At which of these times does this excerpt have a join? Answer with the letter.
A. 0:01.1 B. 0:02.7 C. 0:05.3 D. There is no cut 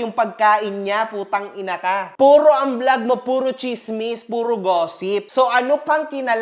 C